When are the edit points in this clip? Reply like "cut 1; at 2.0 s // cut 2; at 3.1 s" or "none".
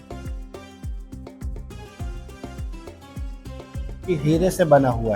cut 1; at 3.9 s